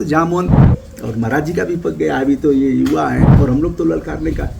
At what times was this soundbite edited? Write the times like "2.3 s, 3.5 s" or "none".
3.3 s